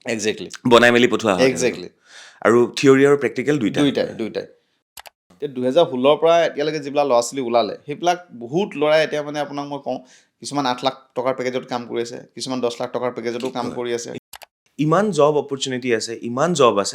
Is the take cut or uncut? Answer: cut